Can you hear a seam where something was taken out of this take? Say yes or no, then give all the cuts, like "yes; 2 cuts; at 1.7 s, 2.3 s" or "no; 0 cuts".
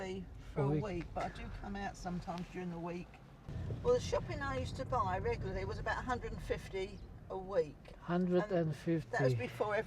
yes; 1 cut; at 3.5 s